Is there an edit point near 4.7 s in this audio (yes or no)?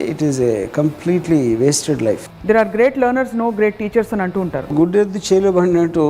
yes